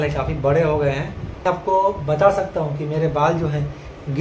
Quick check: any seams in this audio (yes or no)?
yes